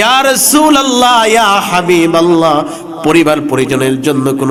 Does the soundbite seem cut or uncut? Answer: uncut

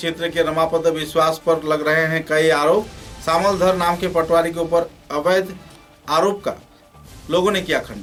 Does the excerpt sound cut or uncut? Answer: uncut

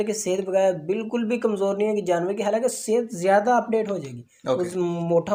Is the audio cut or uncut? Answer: uncut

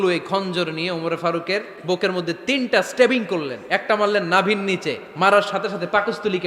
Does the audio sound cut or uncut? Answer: cut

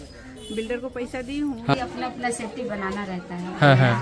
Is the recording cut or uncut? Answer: cut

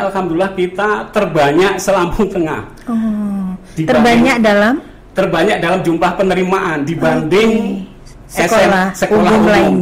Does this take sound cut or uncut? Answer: uncut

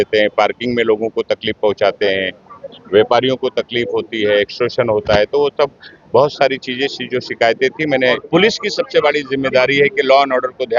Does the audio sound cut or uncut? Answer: cut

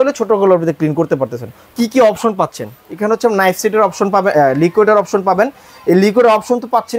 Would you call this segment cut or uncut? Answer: cut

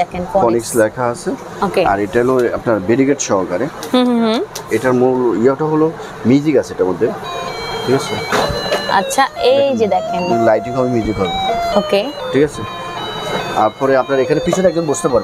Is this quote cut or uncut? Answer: uncut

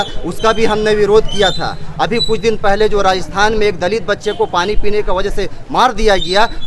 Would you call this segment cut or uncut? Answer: uncut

